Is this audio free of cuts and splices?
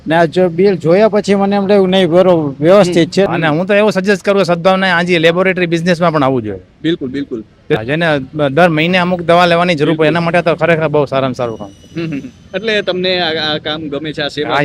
no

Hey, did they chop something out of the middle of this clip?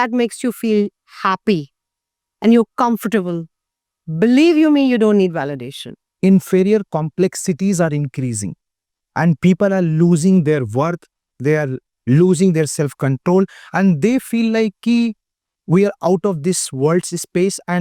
yes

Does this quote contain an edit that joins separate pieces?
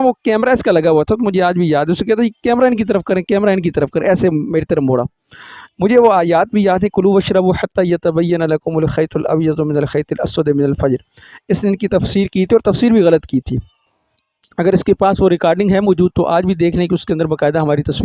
no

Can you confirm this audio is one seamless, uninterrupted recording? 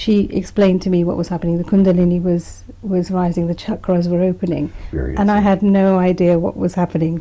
yes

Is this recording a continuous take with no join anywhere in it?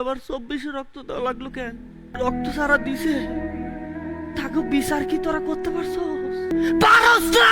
no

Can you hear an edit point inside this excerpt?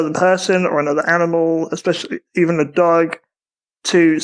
no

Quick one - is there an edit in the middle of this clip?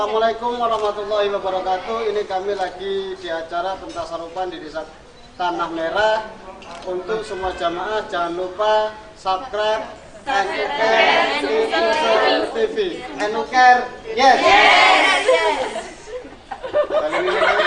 no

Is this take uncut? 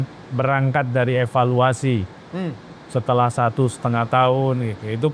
yes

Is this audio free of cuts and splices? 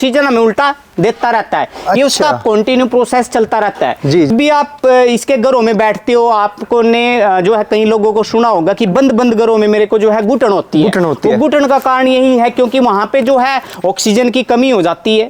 no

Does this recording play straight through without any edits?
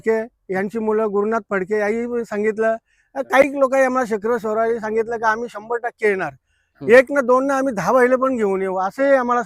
yes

